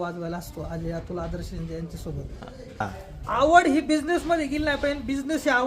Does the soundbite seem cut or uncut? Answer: cut